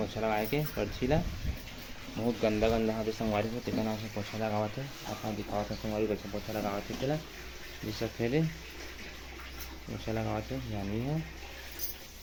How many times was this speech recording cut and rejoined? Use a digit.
0